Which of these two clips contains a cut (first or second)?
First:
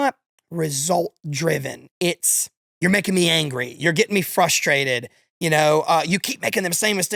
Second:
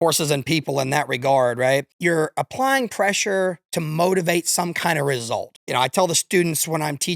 second